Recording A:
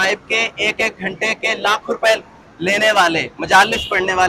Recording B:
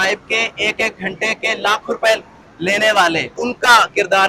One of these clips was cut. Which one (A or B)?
B